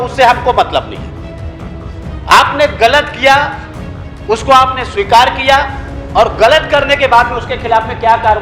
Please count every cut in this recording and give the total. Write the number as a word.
zero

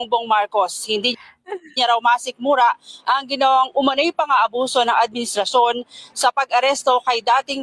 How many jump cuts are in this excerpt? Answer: one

